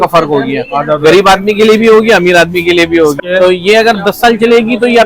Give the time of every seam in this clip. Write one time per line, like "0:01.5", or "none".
0:03.2